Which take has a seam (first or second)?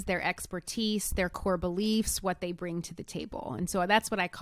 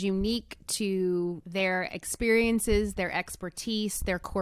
second